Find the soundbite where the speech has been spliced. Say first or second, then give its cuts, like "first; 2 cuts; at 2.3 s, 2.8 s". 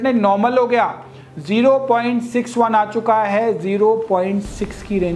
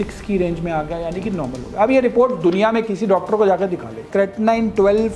second; 1 cut; at 4.1 s